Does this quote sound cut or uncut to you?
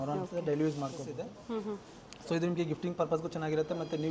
cut